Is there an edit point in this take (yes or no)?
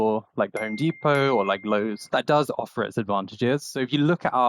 yes